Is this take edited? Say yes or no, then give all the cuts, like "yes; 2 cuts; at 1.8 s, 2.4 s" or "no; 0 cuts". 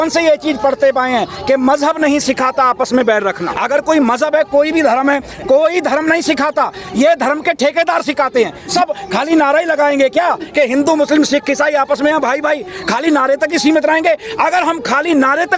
yes; 2 cuts; at 3.5 s, 8.7 s